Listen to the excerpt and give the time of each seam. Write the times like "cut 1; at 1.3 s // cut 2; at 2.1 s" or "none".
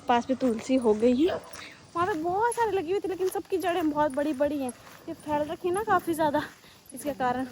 none